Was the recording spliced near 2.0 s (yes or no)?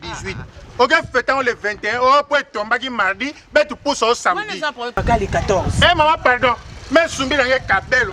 no